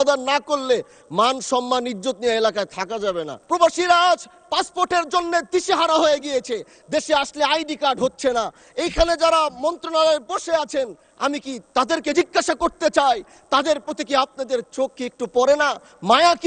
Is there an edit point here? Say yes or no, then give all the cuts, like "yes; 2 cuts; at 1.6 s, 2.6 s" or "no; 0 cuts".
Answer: yes; 1 cut; at 3.3 s